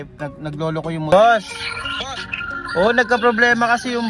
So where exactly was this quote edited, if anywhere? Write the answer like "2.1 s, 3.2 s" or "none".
1.1 s